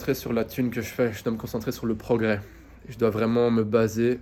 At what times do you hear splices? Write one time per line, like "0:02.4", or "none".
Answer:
none